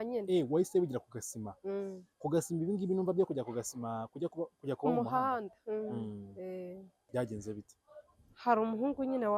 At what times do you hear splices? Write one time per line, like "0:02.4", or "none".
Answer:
0:07.0